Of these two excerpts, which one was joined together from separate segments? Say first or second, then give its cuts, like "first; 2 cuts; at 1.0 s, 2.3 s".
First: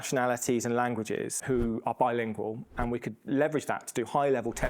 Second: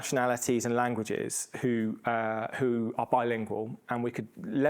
first; 2 cuts; at 1.4 s, 3.1 s